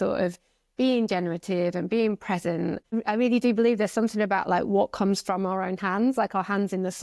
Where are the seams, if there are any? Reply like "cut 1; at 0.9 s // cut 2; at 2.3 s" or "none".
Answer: cut 1; at 2.8 s